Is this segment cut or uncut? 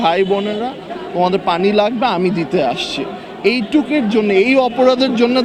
uncut